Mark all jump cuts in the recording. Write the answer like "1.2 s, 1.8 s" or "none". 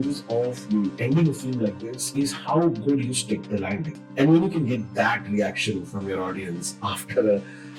4.0 s